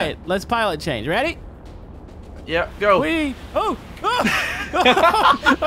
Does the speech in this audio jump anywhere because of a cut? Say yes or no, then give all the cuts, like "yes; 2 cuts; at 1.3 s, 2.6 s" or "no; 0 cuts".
no; 0 cuts